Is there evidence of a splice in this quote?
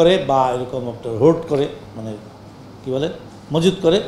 no; 0 cuts

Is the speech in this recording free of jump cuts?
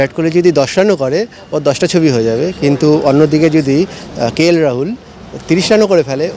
yes; 0 cuts

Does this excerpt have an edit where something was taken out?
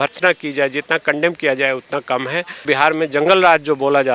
yes; 1 cut; at 2.6 s

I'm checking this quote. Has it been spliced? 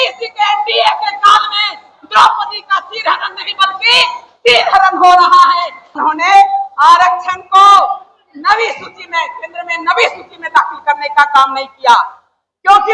yes; 1 cut; at 5.9 s

